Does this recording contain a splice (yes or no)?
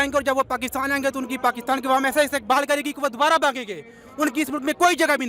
no